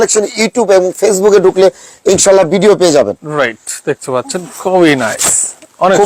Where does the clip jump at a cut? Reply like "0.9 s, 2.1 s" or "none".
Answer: none